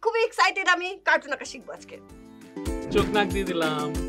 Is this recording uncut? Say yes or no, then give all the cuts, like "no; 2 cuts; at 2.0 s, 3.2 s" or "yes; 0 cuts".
no; 1 cut; at 2.6 s